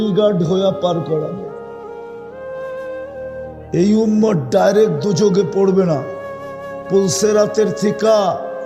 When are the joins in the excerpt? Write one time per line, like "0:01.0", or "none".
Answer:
0:01.4
0:03.7